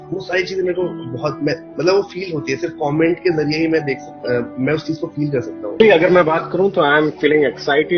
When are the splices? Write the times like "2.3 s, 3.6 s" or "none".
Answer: 5.8 s